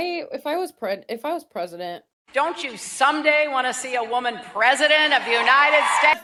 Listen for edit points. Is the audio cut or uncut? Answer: uncut